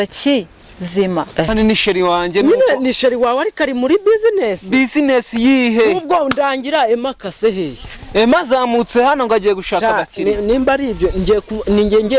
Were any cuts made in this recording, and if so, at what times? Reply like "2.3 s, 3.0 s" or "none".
1.5 s